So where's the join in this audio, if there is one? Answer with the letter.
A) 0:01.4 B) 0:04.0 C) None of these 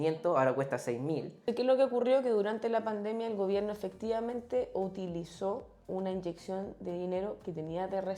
A